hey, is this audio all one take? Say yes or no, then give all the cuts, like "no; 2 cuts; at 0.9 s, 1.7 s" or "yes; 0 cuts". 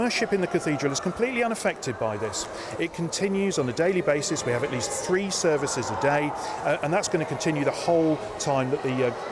yes; 0 cuts